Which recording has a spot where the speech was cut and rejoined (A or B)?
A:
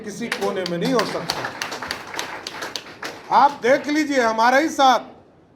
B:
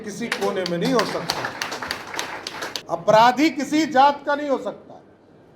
B